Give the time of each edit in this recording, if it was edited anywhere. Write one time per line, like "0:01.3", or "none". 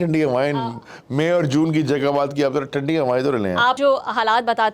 0:03.8

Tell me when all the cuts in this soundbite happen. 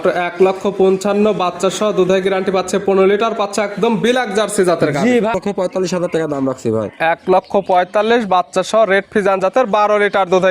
0:05.4

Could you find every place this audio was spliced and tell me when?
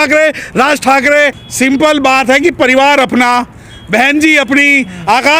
0:01.4

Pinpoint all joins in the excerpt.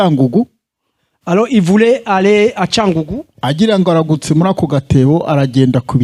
none

